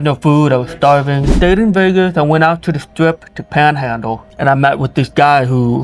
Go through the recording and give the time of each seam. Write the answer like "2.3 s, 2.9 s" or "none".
1.3 s, 4.2 s